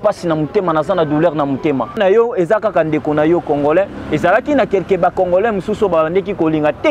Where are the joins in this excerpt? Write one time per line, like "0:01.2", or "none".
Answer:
0:02.0